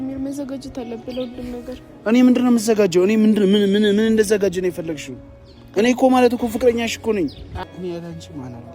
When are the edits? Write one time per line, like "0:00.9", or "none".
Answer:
0:07.5